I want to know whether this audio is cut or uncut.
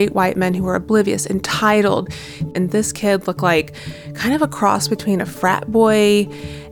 cut